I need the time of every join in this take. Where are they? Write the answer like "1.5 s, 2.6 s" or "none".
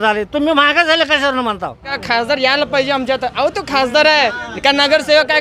2.0 s